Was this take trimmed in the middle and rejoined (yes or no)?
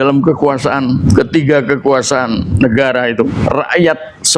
yes